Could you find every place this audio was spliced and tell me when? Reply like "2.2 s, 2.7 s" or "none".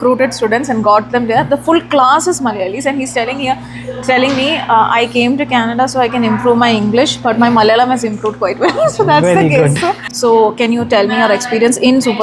10.1 s